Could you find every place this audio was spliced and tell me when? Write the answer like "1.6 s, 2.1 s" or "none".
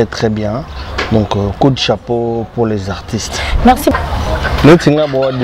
3.9 s